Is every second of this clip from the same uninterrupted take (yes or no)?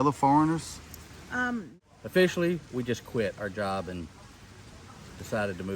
no